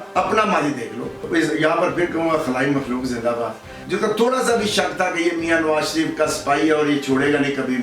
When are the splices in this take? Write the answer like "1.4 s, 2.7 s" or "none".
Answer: 1.2 s, 3.7 s